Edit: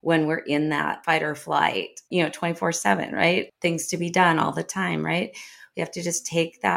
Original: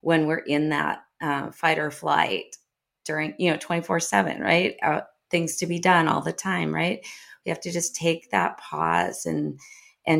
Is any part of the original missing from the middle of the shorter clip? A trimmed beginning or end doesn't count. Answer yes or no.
yes